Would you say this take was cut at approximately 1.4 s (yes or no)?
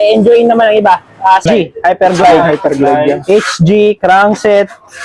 yes